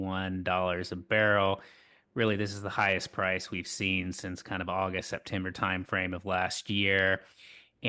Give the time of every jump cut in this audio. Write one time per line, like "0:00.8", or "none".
none

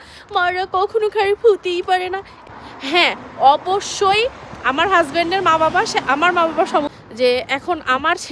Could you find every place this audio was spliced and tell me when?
0:02.2
0:06.9

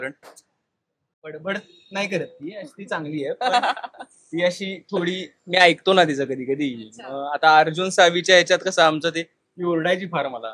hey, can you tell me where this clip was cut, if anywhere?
0:01.2

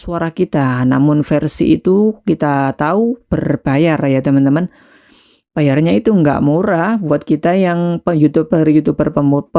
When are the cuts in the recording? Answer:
none

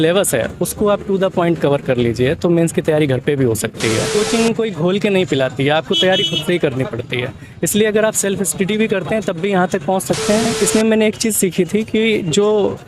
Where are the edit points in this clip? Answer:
0:04.1
0:10.5

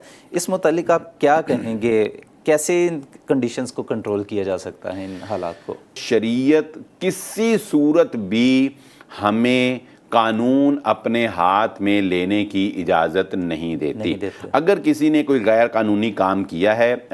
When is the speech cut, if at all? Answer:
0:06.0

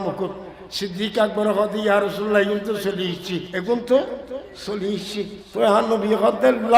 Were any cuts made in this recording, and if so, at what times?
0:03.5
0:05.4

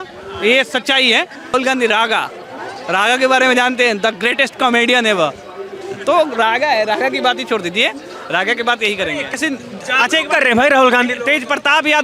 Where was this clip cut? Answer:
0:01.5
0:09.3

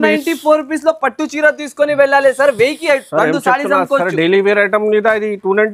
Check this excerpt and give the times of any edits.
none

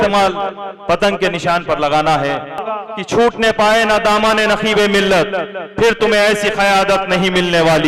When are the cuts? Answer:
0:02.7

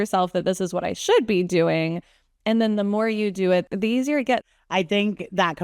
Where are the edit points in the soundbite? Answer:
0:03.6
0:04.5

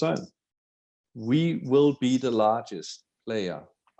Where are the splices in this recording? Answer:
0:01.1

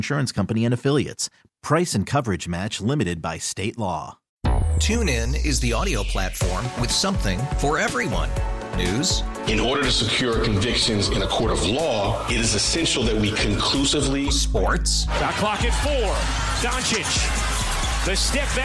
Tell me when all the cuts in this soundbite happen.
0:04.2

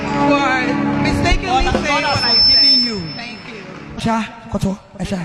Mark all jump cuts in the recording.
0:04.0

